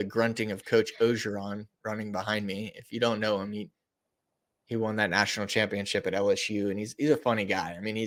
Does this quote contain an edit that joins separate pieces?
no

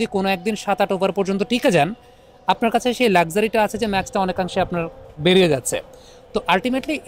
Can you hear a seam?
no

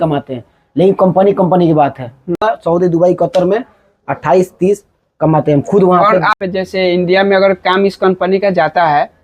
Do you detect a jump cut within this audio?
yes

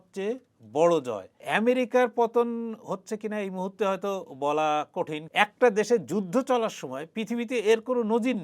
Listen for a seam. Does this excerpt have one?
yes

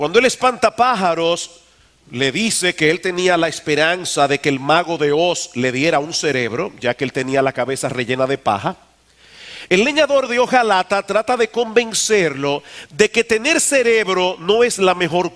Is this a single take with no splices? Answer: yes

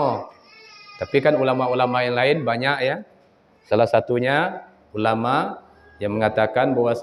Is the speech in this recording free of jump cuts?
yes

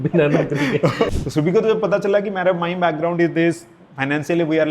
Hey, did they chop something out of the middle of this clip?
yes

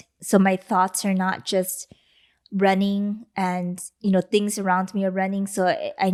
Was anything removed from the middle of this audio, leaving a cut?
no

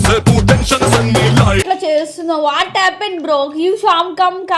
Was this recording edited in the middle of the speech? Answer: yes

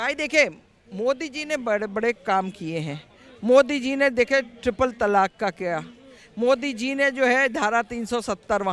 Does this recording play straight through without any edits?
yes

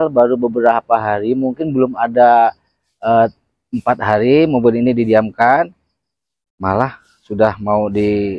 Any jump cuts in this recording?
no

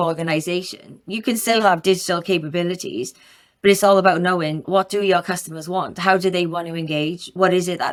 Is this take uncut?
yes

